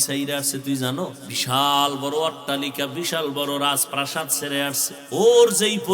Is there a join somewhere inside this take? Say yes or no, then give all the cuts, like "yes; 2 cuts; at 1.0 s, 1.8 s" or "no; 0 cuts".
yes; 2 cuts; at 1.3 s, 4.9 s